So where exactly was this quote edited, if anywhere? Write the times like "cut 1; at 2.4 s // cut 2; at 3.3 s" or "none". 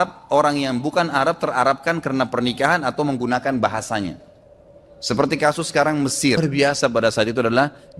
cut 1; at 6.4 s